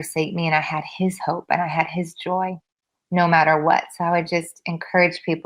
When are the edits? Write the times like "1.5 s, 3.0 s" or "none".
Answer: none